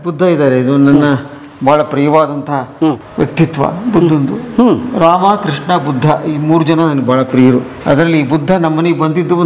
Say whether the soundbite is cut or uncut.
cut